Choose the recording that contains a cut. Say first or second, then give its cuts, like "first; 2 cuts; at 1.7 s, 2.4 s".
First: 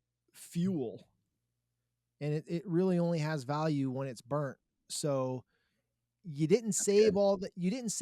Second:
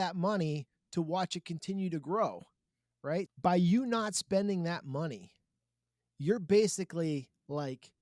second; 1 cut; at 3.3 s